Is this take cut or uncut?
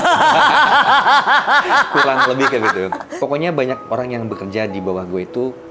cut